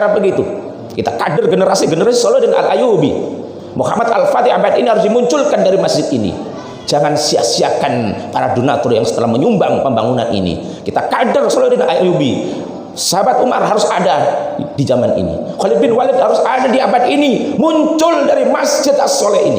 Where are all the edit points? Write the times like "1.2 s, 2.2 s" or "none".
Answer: none